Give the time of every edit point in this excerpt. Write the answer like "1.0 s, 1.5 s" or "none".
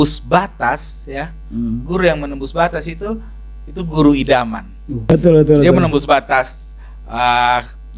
5.1 s